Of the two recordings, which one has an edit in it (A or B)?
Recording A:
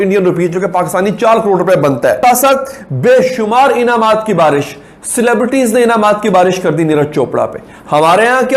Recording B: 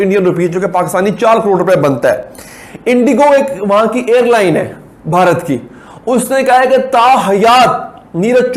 A